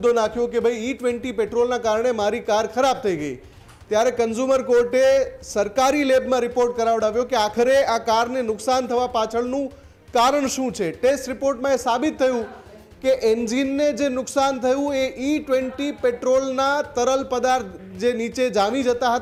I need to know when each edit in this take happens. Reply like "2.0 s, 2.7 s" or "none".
none